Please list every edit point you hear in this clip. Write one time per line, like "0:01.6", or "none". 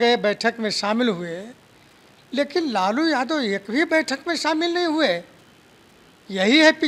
none